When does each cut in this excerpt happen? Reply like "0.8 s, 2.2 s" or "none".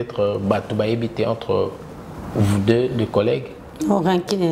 none